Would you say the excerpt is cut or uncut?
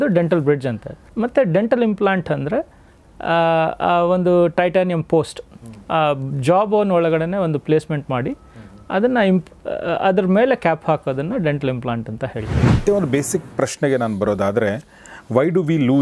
cut